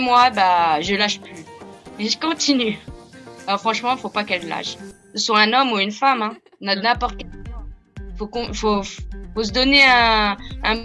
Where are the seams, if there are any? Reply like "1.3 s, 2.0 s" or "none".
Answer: none